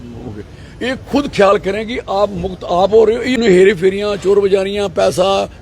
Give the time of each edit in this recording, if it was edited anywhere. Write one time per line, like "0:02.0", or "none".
0:03.4